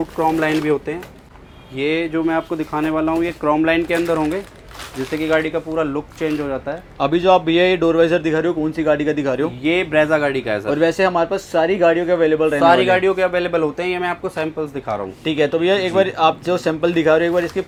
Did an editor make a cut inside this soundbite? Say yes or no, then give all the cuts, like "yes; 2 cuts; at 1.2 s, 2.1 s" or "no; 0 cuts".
no; 0 cuts